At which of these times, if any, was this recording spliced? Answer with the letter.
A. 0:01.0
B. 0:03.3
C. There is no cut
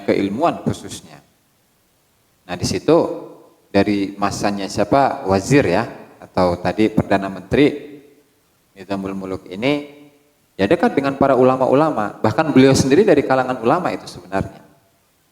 C